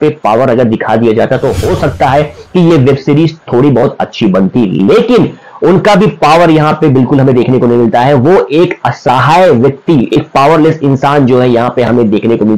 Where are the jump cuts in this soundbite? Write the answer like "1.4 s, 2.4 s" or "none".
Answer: none